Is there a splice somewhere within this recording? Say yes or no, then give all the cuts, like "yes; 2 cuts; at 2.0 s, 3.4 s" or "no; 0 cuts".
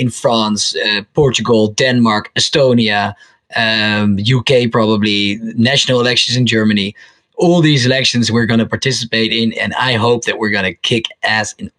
no; 0 cuts